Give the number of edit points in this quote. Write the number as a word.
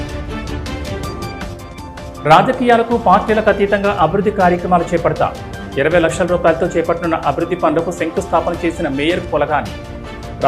one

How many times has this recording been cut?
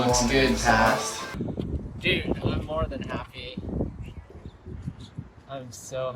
two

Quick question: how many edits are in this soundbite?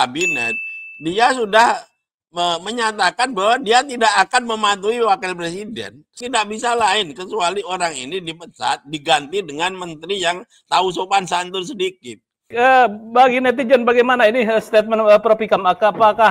two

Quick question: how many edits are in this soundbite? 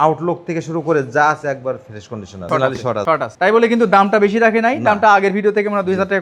one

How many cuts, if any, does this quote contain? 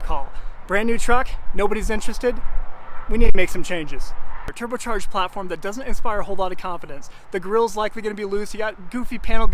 one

